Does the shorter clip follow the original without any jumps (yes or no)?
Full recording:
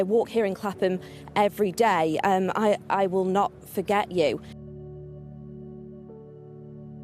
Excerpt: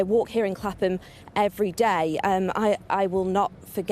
yes